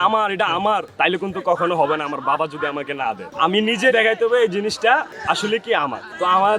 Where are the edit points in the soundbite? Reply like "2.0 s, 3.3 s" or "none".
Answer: none